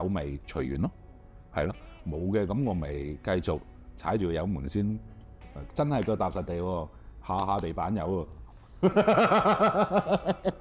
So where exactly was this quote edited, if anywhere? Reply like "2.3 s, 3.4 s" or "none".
none

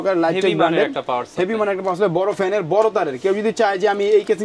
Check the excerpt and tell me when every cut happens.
none

